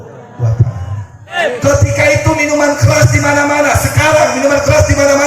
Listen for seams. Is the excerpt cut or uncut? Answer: cut